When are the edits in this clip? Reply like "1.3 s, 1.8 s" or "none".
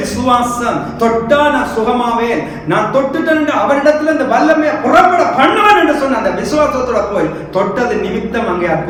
none